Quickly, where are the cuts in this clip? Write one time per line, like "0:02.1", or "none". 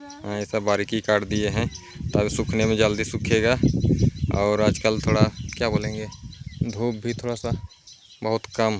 none